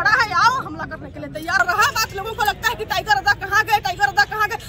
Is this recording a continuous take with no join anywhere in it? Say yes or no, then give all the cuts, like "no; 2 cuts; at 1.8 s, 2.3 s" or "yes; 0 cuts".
no; 1 cut; at 1.6 s